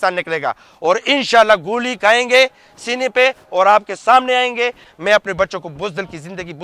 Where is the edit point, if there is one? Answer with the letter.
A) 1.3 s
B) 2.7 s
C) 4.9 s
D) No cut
C